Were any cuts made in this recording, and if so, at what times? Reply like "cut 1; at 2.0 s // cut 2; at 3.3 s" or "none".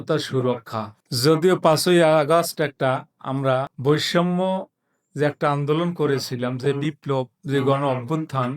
cut 1; at 1.0 s // cut 2; at 3.7 s